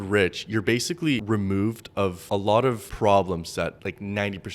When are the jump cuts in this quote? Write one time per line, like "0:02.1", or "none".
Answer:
0:01.2
0:02.6
0:03.8